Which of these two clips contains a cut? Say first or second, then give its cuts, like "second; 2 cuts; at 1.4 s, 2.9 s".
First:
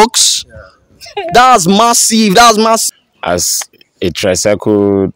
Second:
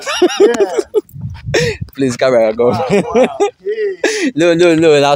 first; 1 cut; at 2.8 s